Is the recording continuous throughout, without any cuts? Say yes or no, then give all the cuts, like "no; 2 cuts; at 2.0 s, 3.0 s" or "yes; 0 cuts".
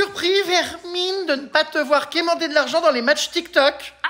yes; 0 cuts